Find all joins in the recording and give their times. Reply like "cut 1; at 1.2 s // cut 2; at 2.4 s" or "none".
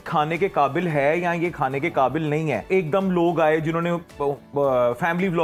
cut 1; at 2.7 s